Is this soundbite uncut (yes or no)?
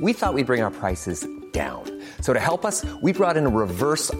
yes